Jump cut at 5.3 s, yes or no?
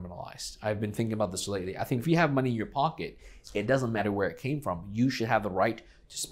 no